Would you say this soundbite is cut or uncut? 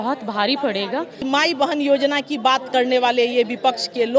cut